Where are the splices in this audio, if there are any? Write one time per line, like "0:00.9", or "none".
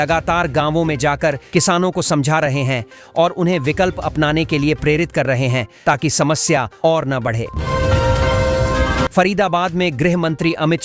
0:07.5
0:09.1